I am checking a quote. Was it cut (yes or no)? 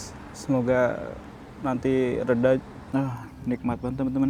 yes